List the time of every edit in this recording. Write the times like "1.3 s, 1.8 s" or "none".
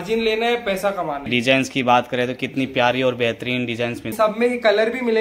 1.3 s, 4.1 s